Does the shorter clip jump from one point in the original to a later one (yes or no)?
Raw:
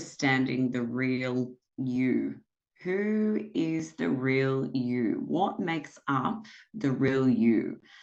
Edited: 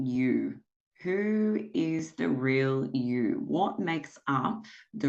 no